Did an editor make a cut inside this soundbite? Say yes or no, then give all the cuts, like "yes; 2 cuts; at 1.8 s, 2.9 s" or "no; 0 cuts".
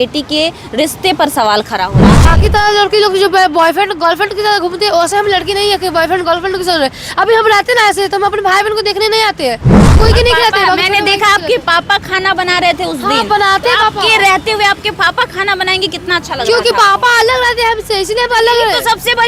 yes; 2 cuts; at 2.2 s, 9.9 s